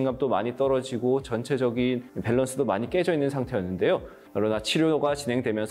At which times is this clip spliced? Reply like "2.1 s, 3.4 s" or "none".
none